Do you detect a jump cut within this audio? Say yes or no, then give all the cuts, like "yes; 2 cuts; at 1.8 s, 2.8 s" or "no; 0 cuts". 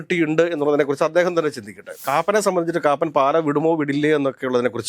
yes; 1 cut; at 2.0 s